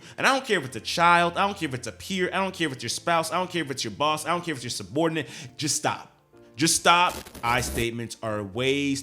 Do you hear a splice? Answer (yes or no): yes